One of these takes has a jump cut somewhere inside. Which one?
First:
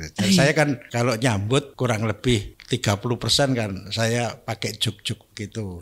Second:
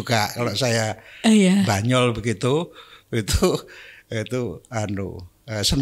first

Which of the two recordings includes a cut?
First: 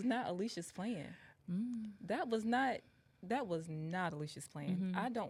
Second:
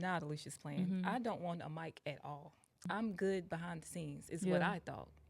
second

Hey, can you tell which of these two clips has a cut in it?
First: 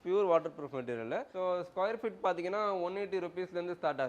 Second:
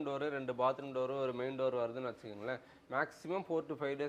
first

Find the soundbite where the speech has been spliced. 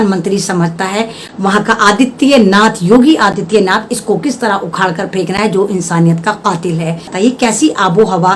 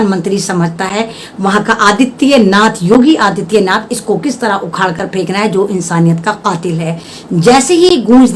first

